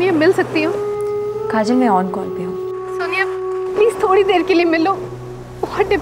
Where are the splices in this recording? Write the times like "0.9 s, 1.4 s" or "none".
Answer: 2.1 s, 3.8 s